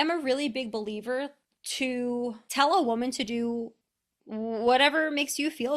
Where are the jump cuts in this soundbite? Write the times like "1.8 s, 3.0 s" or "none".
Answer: 2.4 s